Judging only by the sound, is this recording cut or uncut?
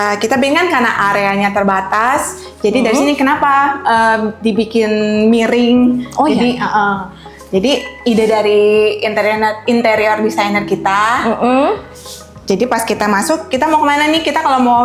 uncut